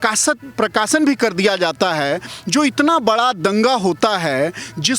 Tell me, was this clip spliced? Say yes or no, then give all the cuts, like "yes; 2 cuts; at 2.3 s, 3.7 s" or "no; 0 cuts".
no; 0 cuts